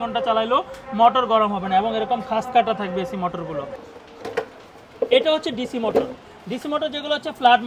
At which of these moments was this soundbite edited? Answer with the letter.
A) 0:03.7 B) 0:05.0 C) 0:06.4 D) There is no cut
A